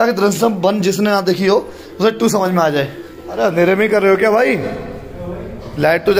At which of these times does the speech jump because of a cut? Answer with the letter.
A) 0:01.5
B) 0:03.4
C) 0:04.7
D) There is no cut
B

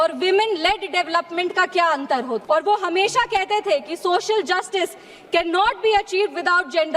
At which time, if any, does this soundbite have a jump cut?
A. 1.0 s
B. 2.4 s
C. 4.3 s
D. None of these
B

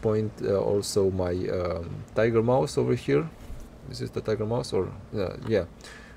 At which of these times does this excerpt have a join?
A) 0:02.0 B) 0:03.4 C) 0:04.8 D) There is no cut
D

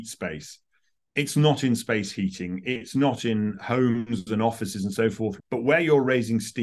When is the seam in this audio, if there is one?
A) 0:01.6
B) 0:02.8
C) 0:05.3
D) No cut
C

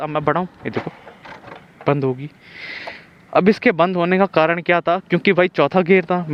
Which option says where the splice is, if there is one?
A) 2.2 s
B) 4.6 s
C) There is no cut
C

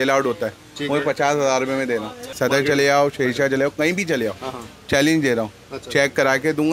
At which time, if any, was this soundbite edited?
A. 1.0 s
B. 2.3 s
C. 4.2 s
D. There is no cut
B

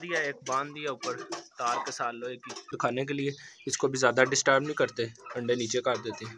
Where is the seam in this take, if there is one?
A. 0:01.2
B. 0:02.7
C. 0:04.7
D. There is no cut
B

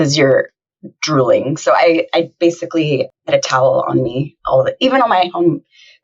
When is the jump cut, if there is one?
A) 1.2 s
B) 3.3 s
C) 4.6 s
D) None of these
B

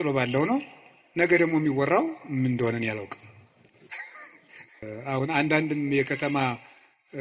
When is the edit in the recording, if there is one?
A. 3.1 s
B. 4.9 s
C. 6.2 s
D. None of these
B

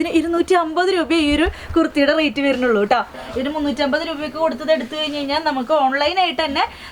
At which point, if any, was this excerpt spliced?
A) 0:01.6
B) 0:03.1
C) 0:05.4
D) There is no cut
B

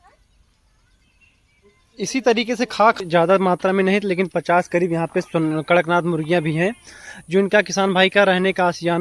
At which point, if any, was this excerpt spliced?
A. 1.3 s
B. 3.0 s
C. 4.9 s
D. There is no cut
B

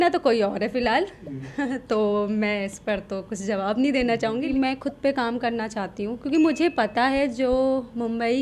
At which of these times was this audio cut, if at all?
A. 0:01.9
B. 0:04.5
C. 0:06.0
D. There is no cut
B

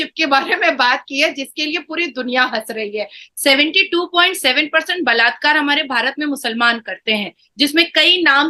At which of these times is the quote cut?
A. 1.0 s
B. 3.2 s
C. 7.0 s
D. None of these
B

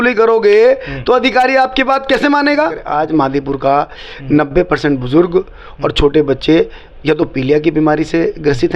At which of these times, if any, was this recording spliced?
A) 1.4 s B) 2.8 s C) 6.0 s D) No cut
B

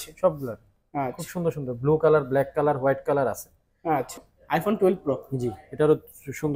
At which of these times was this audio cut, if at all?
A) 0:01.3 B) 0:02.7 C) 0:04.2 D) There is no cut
C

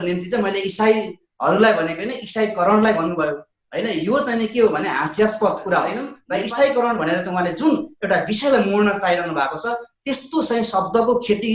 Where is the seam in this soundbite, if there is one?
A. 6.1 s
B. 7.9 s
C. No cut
A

